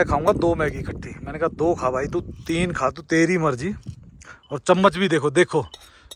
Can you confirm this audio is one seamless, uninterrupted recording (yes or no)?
yes